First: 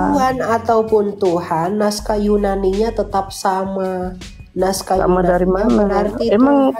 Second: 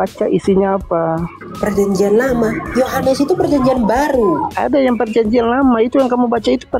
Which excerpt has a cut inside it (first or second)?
second